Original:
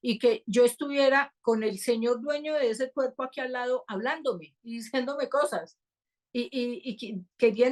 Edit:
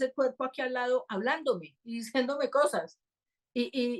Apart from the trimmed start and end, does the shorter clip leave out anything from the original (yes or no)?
no